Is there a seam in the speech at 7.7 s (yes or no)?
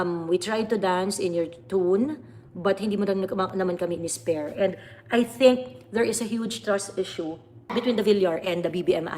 yes